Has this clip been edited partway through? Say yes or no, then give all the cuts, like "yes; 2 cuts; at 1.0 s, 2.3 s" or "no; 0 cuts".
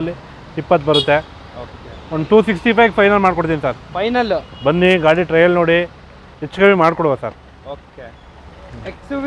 no; 0 cuts